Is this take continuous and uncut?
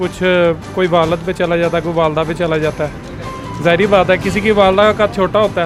yes; 0 cuts

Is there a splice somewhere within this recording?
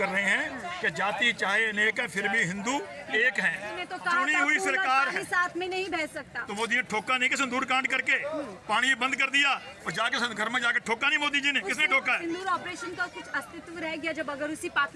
yes; 1 cut; at 3.9 s

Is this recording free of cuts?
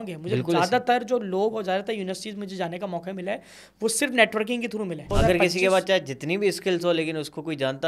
no; 1 cut; at 5.0 s

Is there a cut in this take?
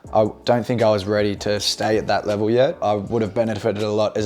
yes; 1 cut; at 2.8 s

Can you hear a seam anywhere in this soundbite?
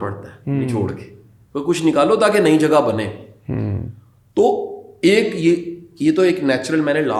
no; 0 cuts

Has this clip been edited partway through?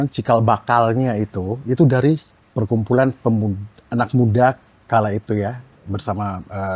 yes; 1 cut; at 2.4 s

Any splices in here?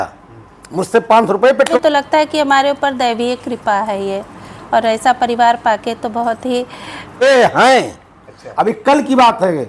yes; 2 cuts; at 1.7 s, 7.1 s

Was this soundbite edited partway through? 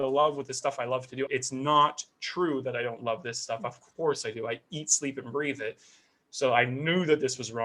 yes; 1 cut; at 1.3 s

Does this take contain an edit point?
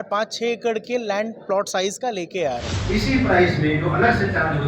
yes; 1 cut; at 2.7 s

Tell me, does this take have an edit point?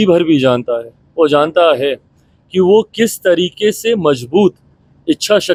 no; 0 cuts

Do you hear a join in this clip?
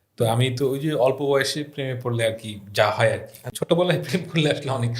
yes; 1 cut; at 3.4 s

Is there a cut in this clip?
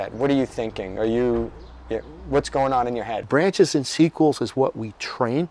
yes; 1 cut; at 3.2 s

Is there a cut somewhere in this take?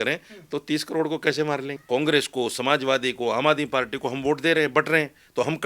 yes; 1 cut; at 1.7 s

